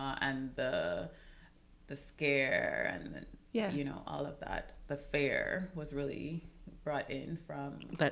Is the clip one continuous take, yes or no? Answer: yes